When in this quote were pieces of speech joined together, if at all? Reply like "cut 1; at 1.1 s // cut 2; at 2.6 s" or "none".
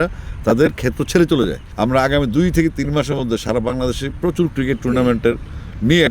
cut 1; at 1.6 s